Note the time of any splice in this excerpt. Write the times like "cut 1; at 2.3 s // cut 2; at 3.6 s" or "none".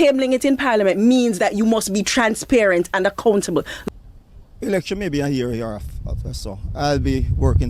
cut 1; at 3.7 s